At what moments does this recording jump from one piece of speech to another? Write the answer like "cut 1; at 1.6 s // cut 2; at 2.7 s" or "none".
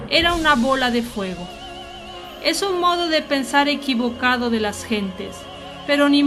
cut 1; at 3.0 s